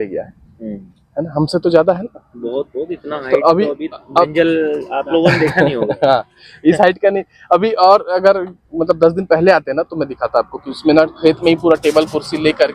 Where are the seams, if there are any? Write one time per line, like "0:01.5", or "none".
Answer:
none